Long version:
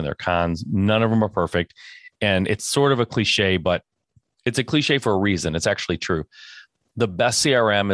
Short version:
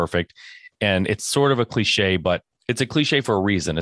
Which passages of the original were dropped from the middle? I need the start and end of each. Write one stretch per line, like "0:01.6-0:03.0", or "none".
0:03.9-0:04.3